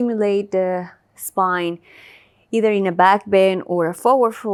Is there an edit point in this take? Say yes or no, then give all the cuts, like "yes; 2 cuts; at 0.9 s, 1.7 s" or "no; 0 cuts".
no; 0 cuts